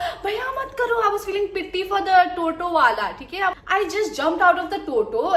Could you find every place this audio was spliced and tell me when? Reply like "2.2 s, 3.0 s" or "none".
3.6 s